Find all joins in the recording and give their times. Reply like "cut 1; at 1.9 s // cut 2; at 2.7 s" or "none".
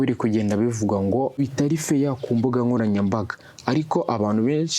cut 1; at 1.4 s